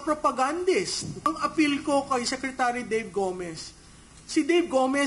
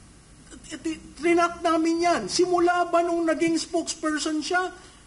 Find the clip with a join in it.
first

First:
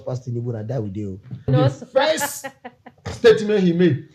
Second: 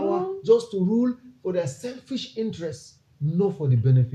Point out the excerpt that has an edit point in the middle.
first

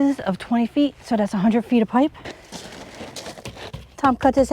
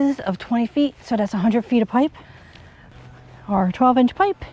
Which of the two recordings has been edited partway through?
first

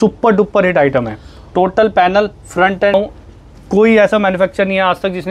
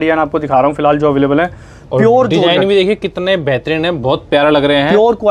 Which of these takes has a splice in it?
first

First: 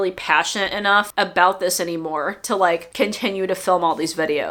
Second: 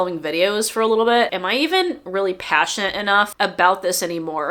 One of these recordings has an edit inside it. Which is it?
second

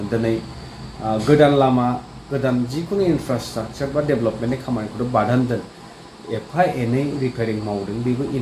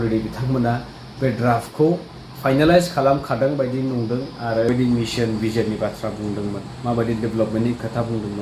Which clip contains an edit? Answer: second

